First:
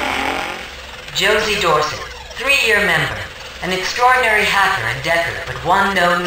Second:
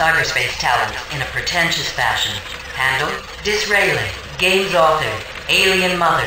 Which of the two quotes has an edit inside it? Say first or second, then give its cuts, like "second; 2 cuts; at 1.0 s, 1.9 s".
first; 1 cut; at 1.0 s